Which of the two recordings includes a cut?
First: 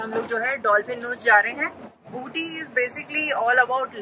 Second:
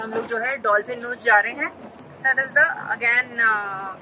first; 1 cut; at 2.0 s

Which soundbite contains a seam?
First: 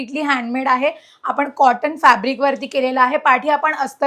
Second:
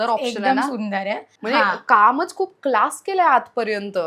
second; 1 cut; at 1.3 s

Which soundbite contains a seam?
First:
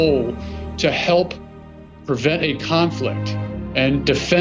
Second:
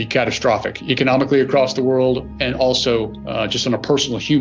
first; 1 cut; at 1.9 s

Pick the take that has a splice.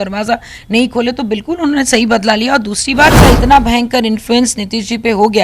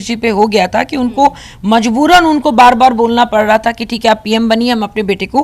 first; 1 cut; at 3.2 s

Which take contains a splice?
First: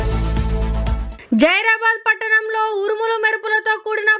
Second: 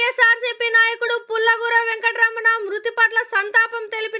first; 1 cut; at 1.1 s

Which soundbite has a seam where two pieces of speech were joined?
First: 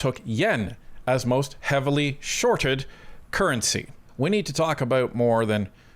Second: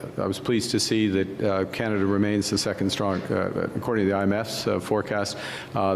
first; 1 cut; at 4.1 s

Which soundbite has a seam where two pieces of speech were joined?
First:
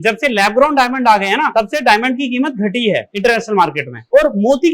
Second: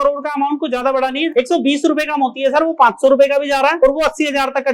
second; 1 cut; at 1.3 s

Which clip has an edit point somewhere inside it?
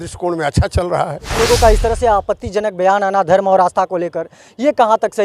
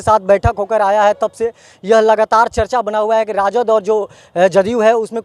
first; 1 cut; at 1.3 s

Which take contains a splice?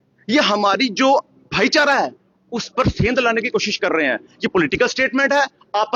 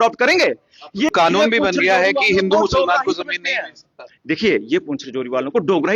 second; 1 cut; at 1.1 s

